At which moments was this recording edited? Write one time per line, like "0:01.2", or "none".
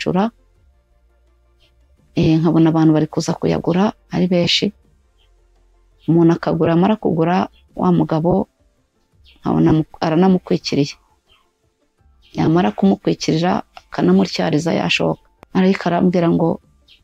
0:15.3